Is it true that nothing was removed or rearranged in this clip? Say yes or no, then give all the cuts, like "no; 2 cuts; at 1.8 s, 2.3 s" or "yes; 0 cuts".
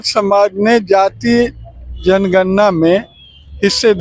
yes; 0 cuts